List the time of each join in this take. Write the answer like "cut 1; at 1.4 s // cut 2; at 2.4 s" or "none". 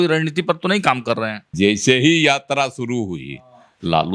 cut 1; at 1.5 s

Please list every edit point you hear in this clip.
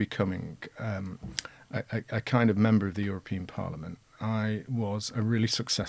none

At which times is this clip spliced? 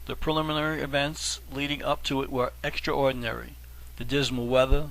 cut 1; at 3.2 s

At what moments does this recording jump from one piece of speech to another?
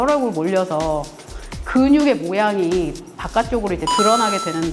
none

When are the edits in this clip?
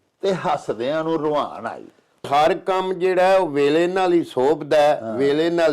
cut 1; at 2.3 s

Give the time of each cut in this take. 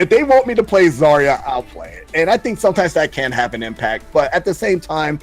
cut 1; at 1.4 s

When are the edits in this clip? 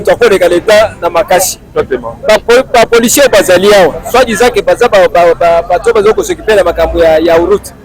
none

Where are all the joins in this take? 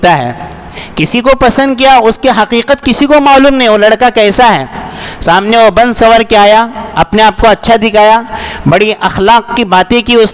none

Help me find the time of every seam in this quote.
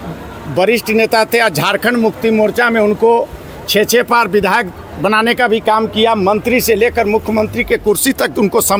none

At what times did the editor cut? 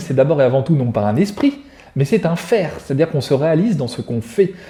none

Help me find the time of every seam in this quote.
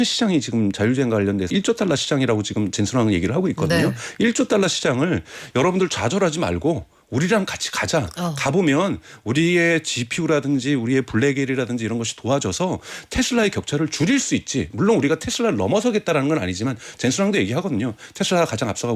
cut 1; at 1.5 s

